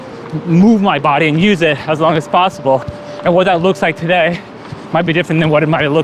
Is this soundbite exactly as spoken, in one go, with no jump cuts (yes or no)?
yes